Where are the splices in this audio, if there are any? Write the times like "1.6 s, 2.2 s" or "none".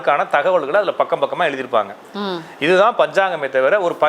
none